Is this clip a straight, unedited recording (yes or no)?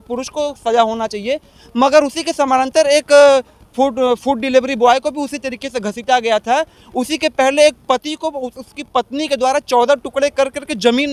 yes